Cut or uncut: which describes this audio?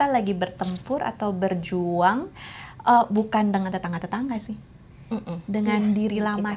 uncut